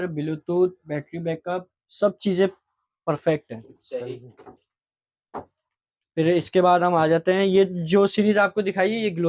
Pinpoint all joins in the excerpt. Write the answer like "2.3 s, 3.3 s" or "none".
none